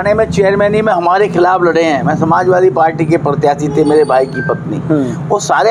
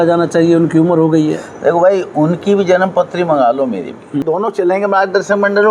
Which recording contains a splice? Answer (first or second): second